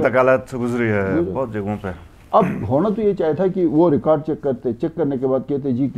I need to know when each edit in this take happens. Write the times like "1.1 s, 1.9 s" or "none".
none